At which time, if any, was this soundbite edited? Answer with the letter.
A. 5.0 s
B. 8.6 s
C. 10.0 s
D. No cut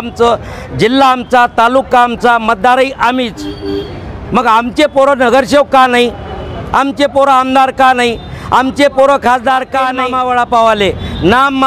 C